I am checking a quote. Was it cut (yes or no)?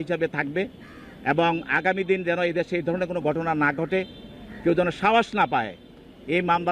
no